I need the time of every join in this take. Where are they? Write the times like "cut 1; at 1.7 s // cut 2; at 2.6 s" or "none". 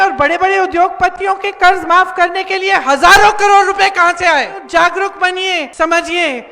cut 1; at 4.6 s // cut 2; at 5.7 s